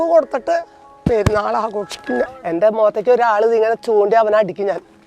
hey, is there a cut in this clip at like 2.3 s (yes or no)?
yes